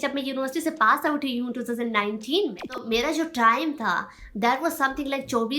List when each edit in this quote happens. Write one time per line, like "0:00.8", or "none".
0:02.7